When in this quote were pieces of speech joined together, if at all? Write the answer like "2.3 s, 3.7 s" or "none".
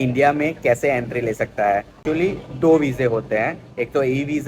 2.0 s